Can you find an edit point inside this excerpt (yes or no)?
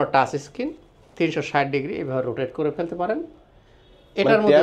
no